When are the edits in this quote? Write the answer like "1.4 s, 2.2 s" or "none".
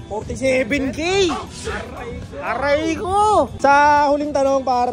3.6 s